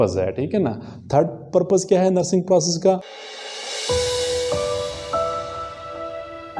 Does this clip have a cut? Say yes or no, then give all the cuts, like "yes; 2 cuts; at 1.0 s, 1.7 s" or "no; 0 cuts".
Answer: yes; 1 cut; at 3.0 s